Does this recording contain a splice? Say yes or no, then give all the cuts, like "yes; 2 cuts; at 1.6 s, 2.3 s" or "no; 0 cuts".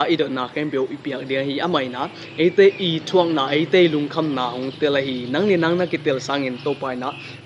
no; 0 cuts